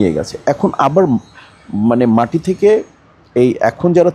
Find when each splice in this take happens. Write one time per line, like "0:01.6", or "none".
none